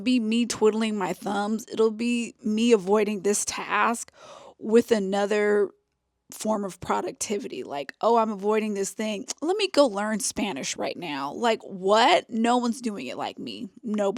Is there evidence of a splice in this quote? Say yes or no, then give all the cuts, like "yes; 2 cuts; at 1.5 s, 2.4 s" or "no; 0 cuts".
no; 0 cuts